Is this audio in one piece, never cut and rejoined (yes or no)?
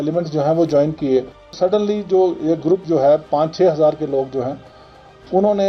no